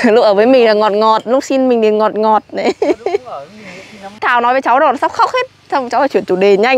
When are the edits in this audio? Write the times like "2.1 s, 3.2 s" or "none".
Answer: 4.2 s